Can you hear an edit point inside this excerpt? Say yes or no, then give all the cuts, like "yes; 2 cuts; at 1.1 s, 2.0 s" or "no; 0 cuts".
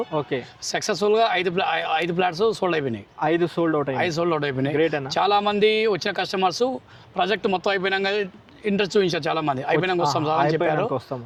no; 0 cuts